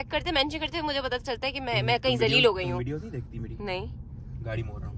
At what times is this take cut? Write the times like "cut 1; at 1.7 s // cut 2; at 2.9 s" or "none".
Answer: none